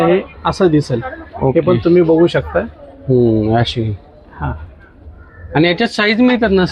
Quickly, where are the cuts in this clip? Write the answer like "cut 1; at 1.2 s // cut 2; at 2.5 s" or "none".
none